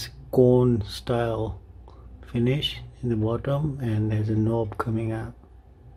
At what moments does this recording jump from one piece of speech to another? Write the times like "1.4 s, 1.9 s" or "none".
none